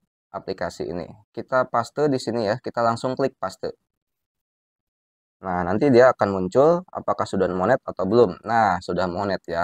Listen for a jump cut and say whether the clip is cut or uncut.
uncut